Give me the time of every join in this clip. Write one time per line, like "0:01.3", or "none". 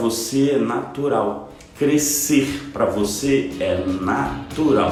none